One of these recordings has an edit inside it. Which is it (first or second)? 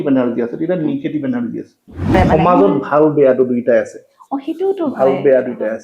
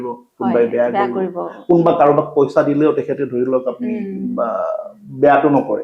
first